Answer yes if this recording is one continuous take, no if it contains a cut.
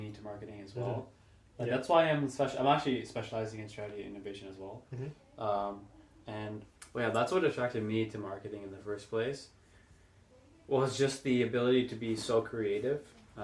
no